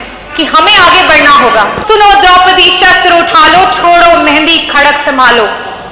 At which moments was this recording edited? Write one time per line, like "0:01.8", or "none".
0:01.8